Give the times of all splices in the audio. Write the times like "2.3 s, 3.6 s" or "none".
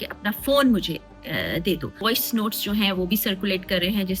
2.0 s